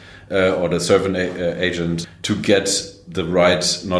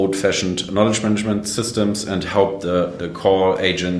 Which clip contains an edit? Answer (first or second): first